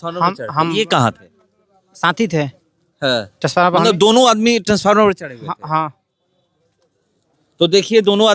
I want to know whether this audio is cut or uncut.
uncut